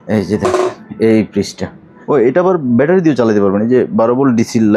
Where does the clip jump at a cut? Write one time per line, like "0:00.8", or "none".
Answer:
0:01.9